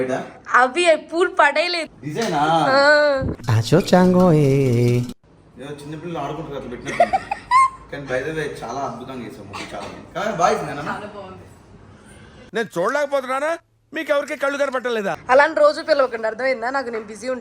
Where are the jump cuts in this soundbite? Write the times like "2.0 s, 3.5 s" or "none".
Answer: 1.9 s, 12.4 s